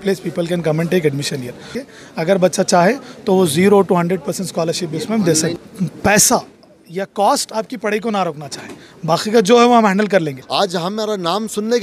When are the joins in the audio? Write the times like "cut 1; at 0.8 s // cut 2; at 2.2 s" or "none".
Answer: cut 1; at 1.8 s // cut 2; at 5.6 s // cut 3; at 10.4 s